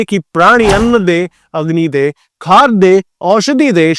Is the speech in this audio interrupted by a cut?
no; 0 cuts

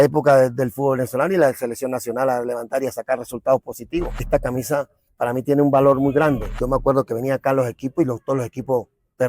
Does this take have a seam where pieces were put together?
yes; 2 cuts; at 4.2 s, 6.5 s

